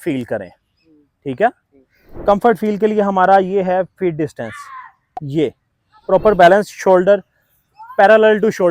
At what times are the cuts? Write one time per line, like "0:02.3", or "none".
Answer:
none